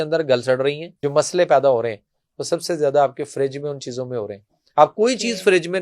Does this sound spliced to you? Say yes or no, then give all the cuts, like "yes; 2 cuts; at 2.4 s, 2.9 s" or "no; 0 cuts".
yes; 1 cut; at 0.9 s